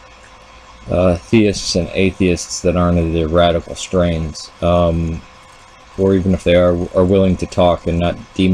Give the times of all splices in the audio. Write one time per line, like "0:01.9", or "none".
0:01.5

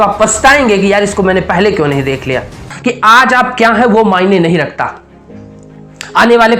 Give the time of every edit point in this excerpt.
0:02.7

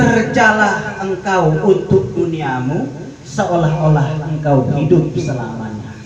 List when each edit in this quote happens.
none

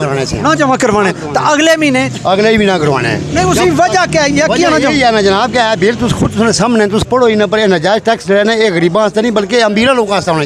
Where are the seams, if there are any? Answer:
none

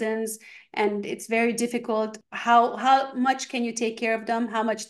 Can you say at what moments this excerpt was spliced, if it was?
0:02.3

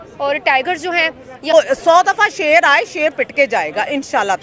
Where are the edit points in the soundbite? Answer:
0:01.5

